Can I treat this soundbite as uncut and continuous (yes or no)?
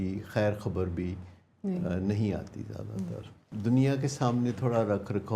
no